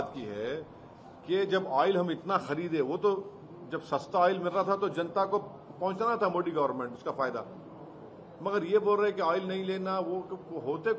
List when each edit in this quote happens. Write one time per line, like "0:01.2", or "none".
none